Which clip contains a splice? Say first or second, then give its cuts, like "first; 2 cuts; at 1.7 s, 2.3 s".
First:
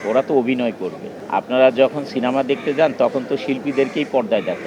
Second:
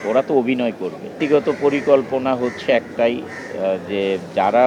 second; 1 cut; at 1.2 s